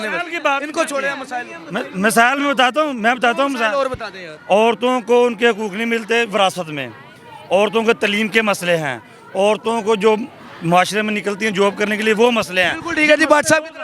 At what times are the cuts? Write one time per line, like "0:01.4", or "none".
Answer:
none